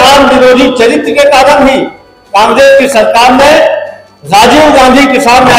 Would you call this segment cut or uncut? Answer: uncut